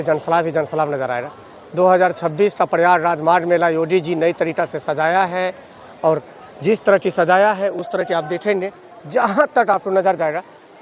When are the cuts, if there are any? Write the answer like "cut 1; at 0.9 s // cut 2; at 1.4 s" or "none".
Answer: none